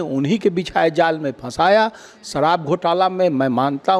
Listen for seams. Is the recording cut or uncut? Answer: uncut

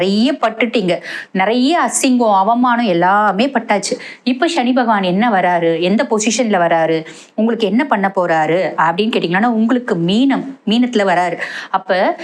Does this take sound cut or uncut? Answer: uncut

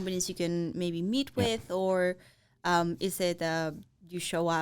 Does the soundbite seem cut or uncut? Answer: uncut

